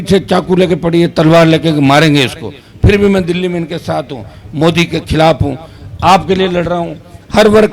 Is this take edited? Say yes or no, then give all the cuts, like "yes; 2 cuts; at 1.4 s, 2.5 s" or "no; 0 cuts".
no; 0 cuts